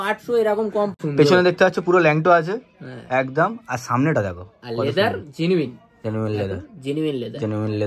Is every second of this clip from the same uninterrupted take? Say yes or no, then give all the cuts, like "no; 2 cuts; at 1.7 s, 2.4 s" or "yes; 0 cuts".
no; 1 cut; at 0.9 s